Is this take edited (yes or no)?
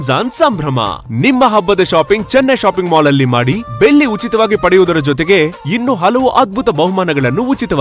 no